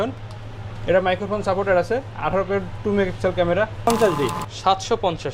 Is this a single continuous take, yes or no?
no